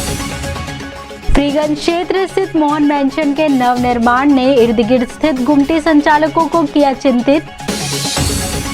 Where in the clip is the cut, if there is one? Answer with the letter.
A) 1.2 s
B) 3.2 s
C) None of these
A